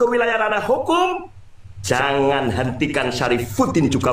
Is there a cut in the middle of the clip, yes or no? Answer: no